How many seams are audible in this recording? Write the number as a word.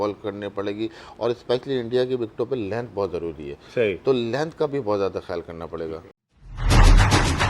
one